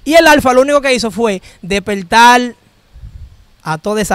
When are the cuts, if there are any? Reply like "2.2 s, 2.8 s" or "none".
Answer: none